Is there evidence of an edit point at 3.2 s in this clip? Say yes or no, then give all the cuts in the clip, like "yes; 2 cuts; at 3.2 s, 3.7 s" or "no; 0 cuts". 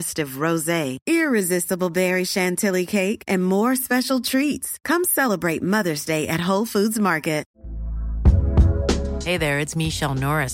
no; 1 cut; at 7.5 s